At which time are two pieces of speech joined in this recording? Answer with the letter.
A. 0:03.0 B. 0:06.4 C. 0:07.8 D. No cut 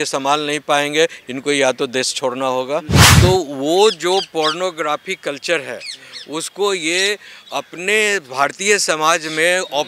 A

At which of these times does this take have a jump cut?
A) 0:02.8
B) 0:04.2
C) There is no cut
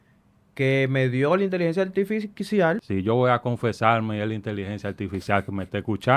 A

